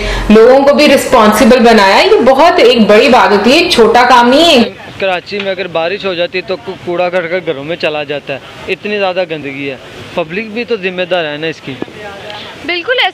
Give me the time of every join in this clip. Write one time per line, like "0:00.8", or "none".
0:04.6